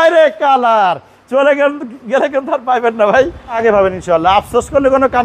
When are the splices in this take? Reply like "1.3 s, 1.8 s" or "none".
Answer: 3.6 s